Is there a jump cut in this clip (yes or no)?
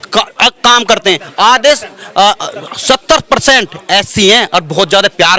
no